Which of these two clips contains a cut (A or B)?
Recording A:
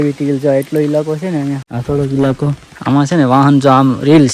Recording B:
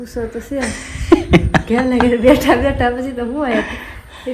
A